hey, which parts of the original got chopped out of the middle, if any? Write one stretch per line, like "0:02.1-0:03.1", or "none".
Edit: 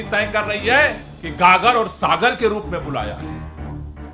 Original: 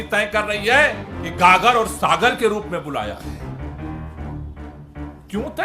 0:03.2-0:03.8